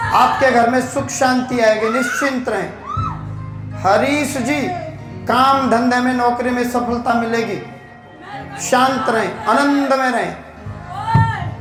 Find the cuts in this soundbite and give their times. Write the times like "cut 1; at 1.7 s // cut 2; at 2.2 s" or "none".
none